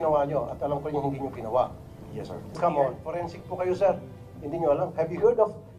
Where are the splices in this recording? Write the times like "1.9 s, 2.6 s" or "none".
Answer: 2.6 s